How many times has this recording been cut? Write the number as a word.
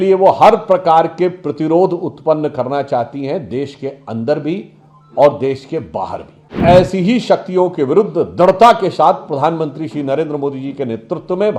one